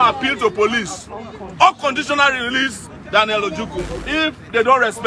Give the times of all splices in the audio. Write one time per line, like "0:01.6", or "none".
0:04.0